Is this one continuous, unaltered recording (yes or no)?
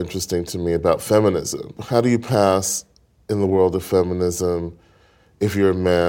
no